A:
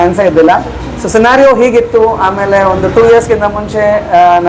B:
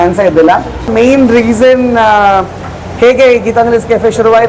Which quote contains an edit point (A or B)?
B